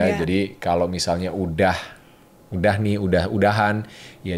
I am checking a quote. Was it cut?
no; 0 cuts

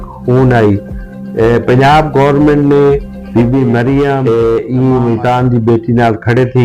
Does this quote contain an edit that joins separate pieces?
yes; 1 cut; at 4.2 s

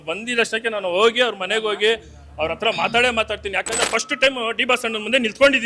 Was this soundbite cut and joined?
yes; 1 cut; at 3.9 s

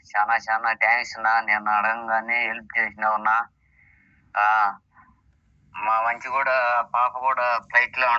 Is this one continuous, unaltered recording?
yes; 0 cuts

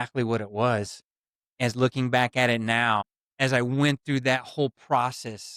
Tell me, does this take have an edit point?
no; 0 cuts

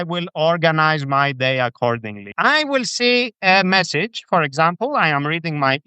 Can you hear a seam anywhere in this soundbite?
yes; 1 cut; at 2.2 s

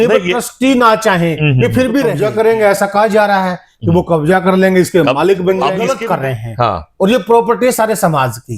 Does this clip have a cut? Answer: yes; 2 cuts; at 2.2 s, 5.8 s

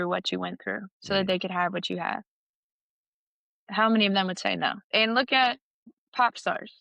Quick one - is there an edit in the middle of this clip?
yes; 3 cuts; at 0.9 s, 4.8 s, 5.8 s

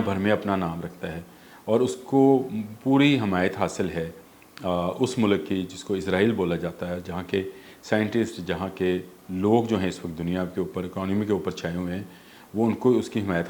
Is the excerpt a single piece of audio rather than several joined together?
yes; 0 cuts

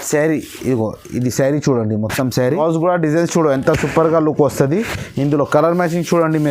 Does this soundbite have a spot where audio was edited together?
yes; 1 cut; at 2.4 s

